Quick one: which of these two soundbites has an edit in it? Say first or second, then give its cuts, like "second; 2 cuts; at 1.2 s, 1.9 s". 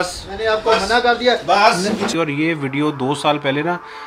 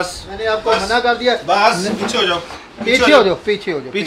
first; 1 cut; at 2.1 s